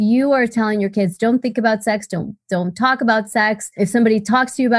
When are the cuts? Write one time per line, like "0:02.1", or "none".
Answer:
0:03.7